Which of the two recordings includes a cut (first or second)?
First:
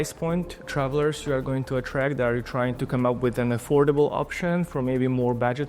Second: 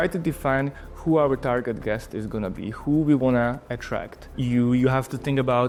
first